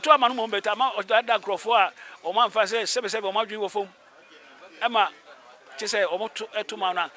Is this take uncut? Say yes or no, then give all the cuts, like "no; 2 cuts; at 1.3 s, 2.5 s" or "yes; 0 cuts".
yes; 0 cuts